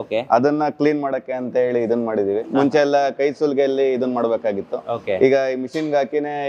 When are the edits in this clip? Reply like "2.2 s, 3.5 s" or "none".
none